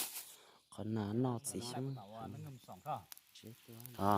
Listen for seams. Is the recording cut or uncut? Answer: cut